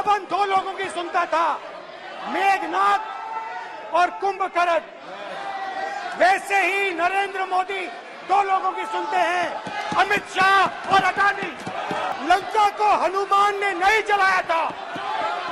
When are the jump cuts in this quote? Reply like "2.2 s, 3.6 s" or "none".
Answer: 12.1 s